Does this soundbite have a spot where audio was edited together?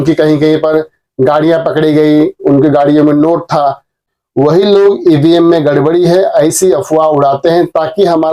yes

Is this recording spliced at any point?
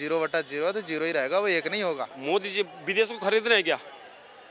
yes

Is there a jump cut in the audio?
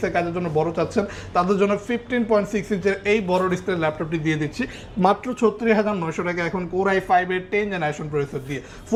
no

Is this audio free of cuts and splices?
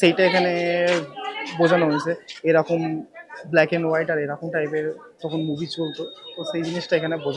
yes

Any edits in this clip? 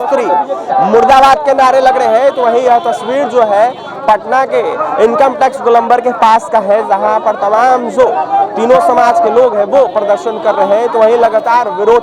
no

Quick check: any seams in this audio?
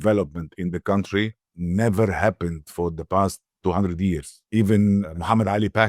yes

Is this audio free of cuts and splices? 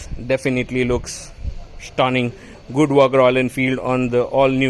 yes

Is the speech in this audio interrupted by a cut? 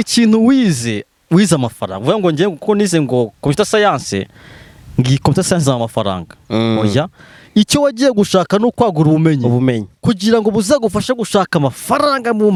no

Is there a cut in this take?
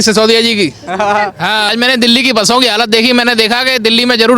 yes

